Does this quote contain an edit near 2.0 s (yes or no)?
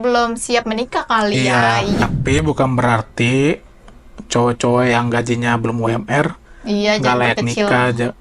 yes